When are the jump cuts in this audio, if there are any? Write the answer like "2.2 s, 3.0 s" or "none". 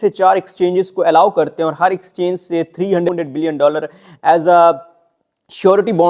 3.1 s